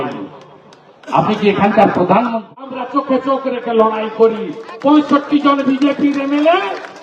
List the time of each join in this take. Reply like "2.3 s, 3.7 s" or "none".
2.8 s